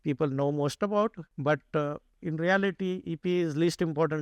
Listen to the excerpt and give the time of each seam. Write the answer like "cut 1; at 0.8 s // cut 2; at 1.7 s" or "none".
cut 1; at 1.3 s

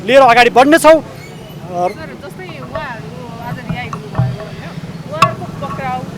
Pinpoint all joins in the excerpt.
none

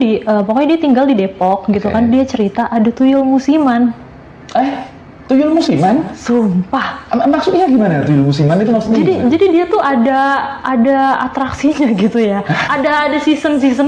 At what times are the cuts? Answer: none

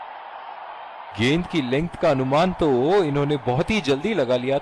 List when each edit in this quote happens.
cut 1; at 1.2 s

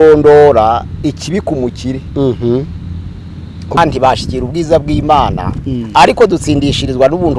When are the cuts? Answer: cut 1; at 3.8 s

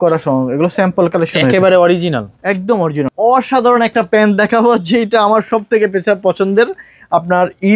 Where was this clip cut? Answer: cut 1; at 3.0 s

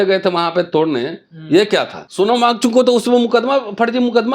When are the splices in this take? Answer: cut 1; at 2.0 s

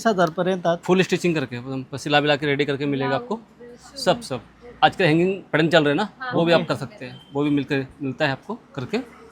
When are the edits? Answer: none

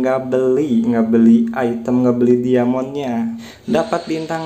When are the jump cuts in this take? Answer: cut 1; at 3.5 s

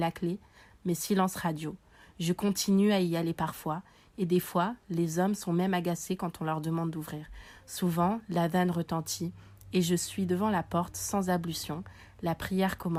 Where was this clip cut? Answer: none

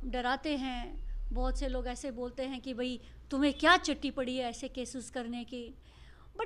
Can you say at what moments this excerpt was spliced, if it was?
none

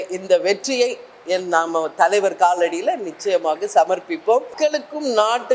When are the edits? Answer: cut 1; at 4.5 s

